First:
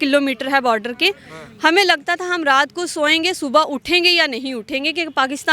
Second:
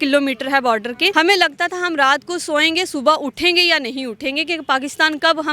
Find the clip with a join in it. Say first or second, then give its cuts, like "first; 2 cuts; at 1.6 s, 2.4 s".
second; 1 cut; at 1.1 s